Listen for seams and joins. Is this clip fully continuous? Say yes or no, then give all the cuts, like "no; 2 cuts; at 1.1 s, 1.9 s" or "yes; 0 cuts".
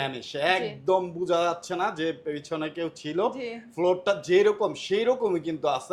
yes; 0 cuts